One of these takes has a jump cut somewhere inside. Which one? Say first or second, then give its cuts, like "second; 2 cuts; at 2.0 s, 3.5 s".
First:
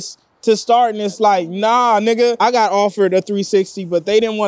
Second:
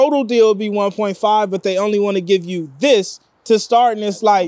first; 1 cut; at 2.4 s